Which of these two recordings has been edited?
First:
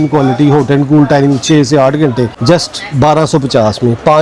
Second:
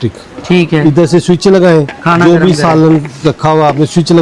first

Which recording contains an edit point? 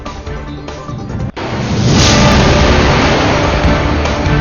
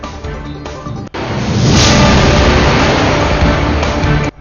first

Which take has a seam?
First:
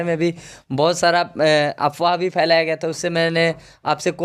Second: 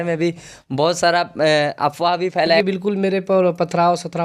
second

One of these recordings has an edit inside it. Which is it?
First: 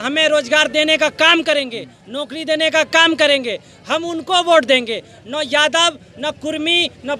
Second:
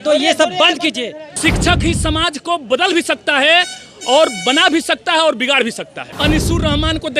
second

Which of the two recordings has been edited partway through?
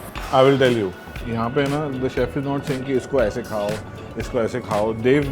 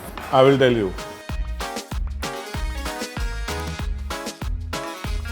first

